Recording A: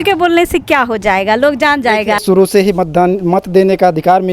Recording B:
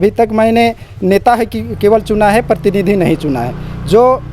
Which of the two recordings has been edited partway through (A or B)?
A